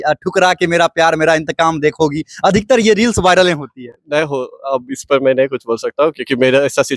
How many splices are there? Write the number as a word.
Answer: zero